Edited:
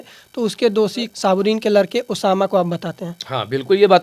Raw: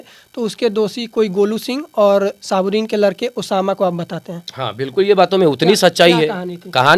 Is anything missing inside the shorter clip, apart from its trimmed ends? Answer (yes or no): yes